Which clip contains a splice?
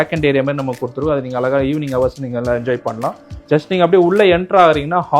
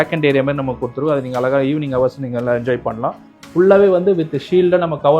second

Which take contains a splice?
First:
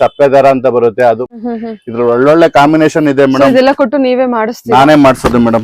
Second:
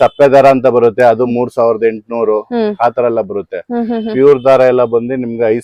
first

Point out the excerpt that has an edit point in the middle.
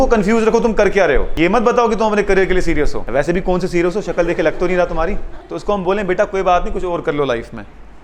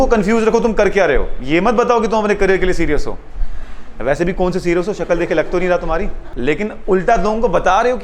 first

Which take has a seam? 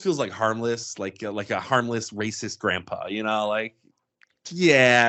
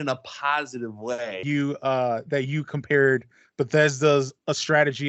second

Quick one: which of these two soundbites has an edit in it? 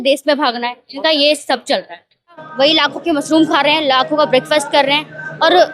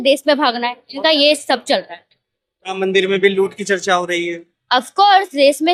first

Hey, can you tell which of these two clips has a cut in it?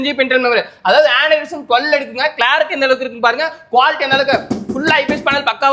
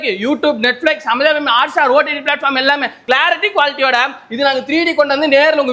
second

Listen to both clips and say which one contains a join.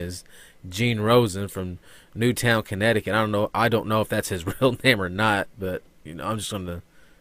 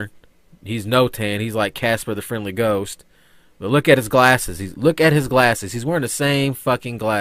first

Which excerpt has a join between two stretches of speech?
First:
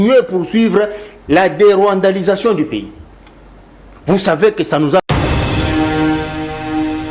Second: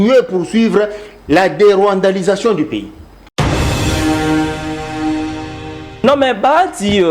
second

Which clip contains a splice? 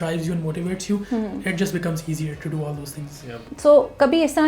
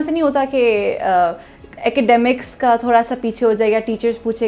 first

